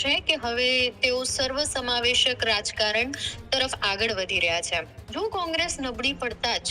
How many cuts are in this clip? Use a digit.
1